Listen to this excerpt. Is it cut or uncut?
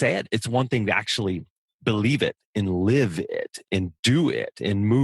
uncut